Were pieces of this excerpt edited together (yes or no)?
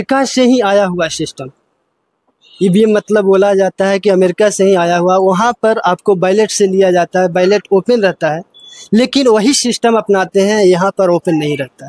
no